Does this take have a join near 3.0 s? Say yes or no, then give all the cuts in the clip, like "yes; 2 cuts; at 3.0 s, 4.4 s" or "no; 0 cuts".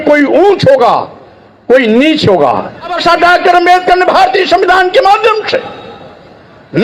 yes; 1 cut; at 3.0 s